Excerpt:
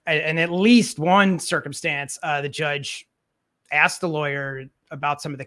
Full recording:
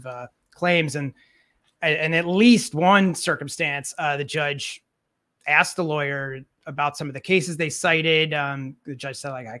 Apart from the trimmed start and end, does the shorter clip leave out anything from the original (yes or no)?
no